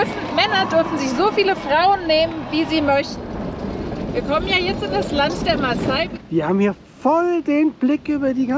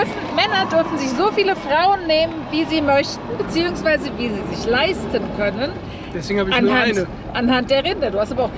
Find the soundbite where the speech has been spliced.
first; 2 cuts; at 3.2 s, 6.1 s

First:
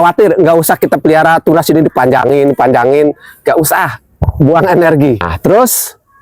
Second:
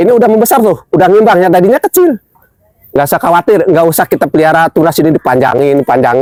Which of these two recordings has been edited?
first; 1 cut; at 5.3 s

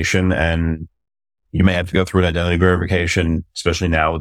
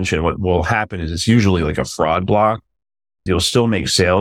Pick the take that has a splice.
second; 1 cut; at 3.2 s

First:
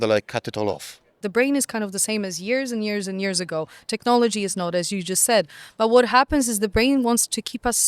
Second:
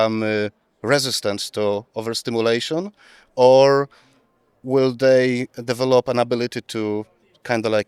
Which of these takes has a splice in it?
first; 1 cut; at 1.2 s

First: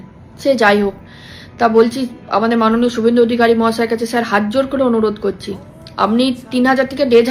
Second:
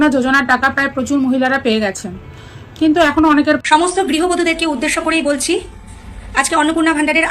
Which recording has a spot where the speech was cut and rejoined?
second; 1 cut; at 3.6 s

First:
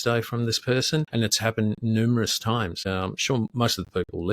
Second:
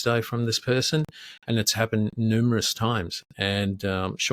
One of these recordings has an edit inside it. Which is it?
first; 2 cuts; at 1.1 s, 2.8 s

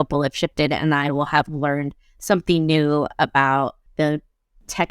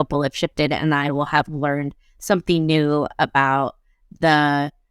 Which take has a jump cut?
first; 1 cut; at 3.8 s

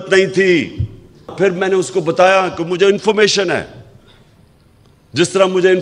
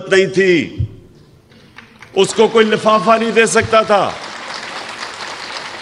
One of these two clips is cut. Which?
first; 1 cut; at 1.3 s

